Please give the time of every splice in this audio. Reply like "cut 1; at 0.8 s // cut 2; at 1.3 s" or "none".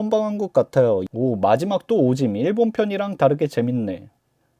cut 1; at 1.0 s